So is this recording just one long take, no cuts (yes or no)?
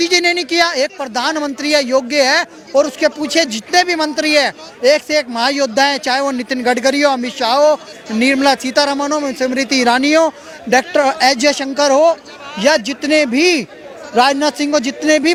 yes